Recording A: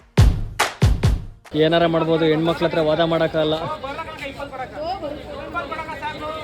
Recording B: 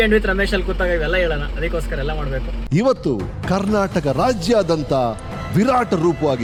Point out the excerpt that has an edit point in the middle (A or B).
A